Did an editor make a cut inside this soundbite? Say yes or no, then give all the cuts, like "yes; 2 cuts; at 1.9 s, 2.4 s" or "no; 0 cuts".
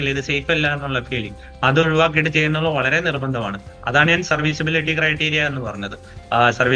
no; 0 cuts